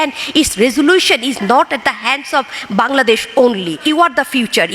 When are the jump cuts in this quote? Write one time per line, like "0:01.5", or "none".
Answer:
0:01.4
0:03.8

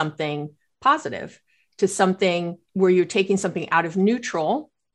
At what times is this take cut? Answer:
0:02.6

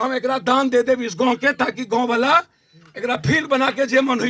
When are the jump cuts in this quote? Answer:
none

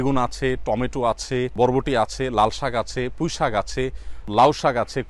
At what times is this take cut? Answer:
0:01.5
0:04.3

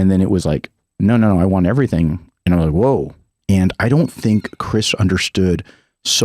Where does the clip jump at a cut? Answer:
0:03.3

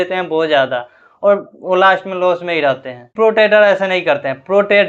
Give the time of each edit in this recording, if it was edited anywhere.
none

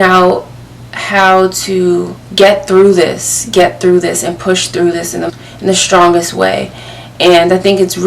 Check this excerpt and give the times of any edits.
0:02.2
0:05.3

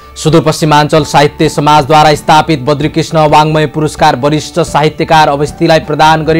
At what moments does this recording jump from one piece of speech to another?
none

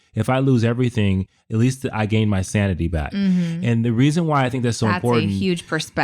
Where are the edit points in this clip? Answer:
none

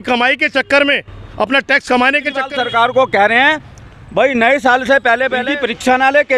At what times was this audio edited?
0:02.5
0:05.4

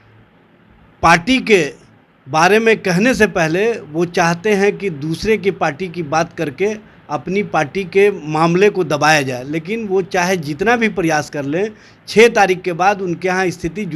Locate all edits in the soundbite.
none

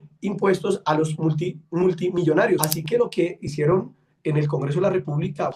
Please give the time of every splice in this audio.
0:02.7

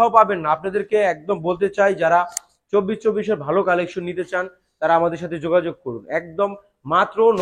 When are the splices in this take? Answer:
none

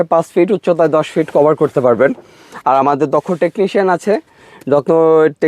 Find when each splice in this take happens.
none

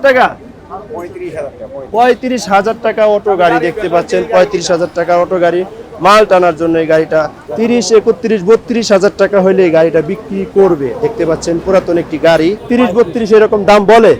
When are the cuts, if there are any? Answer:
0:07.4
0:12.6

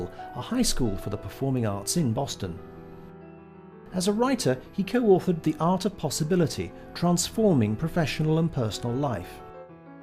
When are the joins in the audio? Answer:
0:08.8

